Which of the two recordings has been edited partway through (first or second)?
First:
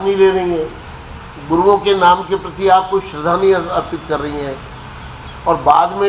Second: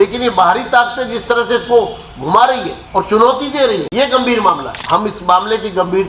second